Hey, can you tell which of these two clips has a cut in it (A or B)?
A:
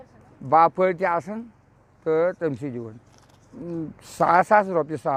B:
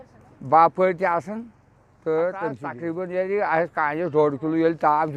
B